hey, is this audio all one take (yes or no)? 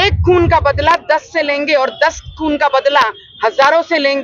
yes